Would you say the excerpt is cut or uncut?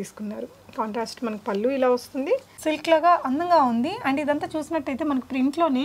cut